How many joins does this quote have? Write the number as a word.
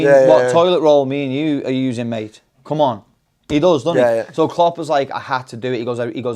zero